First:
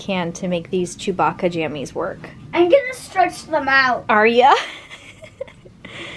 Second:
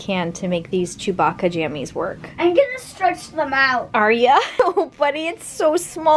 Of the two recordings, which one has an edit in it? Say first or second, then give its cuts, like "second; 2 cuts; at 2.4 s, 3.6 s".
second; 2 cuts; at 2.2 s, 4.5 s